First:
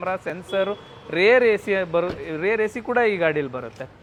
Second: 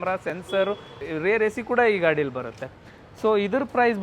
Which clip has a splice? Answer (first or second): second